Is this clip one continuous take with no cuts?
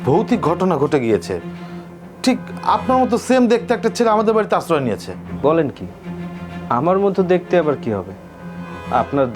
yes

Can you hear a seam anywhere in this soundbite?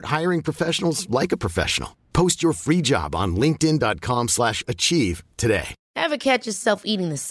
no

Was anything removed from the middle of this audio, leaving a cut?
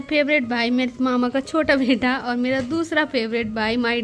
no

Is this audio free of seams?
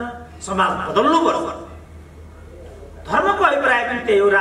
yes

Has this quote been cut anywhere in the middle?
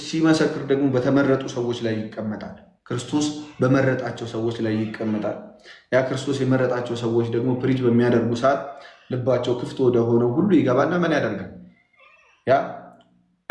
no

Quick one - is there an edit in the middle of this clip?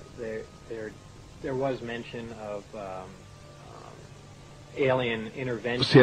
yes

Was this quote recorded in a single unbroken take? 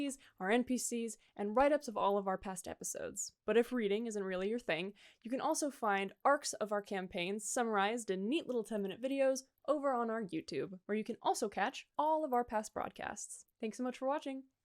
yes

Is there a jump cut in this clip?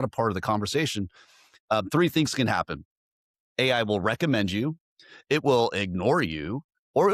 no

